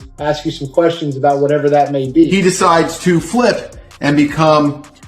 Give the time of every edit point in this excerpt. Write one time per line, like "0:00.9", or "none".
0:02.3